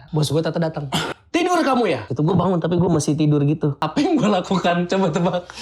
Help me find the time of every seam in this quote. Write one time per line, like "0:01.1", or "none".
0:01.1
0:02.1
0:03.8